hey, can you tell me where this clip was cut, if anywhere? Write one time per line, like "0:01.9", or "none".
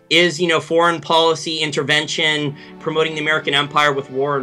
0:02.8